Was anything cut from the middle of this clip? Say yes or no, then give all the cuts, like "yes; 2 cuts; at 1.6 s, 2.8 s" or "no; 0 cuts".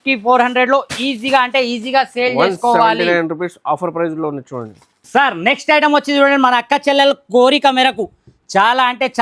no; 0 cuts